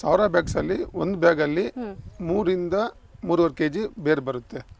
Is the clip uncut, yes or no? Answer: yes